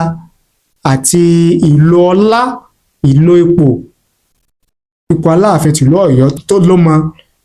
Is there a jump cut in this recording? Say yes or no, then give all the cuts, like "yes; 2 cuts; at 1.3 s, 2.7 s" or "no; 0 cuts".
yes; 1 cut; at 6.4 s